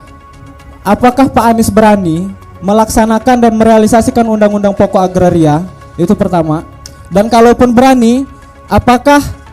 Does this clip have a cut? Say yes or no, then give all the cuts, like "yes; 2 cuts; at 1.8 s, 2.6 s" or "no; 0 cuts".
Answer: no; 0 cuts